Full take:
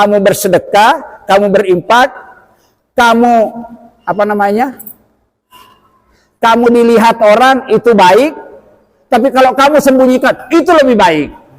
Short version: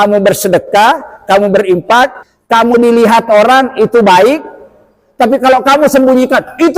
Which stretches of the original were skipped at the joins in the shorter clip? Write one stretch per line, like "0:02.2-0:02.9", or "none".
0:02.3-0:06.2